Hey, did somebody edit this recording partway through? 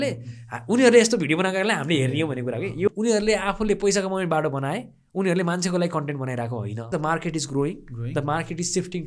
yes; 2 cuts; at 2.9 s, 6.9 s

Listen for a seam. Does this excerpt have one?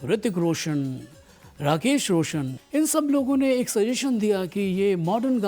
yes; 1 cut; at 2.6 s

